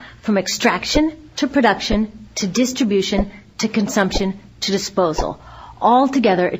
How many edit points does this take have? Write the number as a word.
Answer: zero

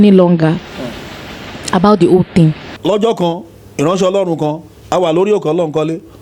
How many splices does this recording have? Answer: one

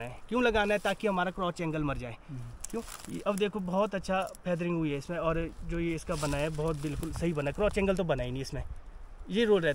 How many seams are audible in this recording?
zero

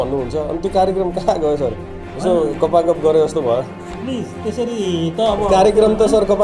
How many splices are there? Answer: zero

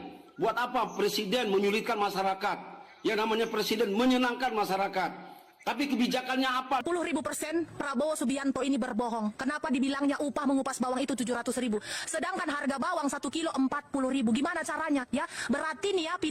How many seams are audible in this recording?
one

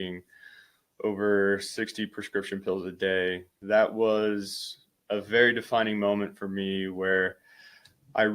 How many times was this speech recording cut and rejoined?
one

